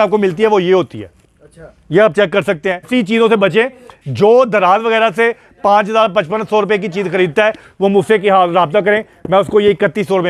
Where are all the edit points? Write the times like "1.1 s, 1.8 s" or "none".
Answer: 2.9 s